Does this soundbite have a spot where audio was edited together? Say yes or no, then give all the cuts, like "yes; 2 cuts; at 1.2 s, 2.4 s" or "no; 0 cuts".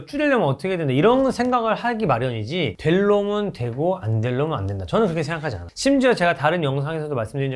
no; 0 cuts